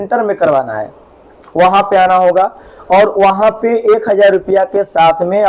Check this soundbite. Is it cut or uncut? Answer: uncut